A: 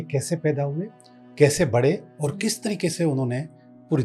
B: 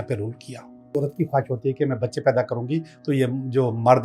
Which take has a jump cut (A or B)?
B